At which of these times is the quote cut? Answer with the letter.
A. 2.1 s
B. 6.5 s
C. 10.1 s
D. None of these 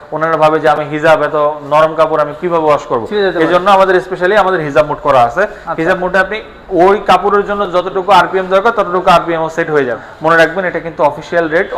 C